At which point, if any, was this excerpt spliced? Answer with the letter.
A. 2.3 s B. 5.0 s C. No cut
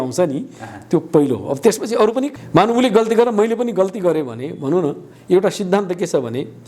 A